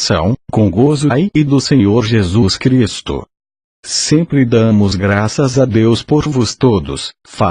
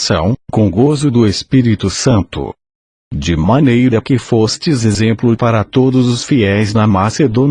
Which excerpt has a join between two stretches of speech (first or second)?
second